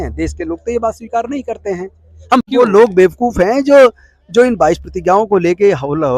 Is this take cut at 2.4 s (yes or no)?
yes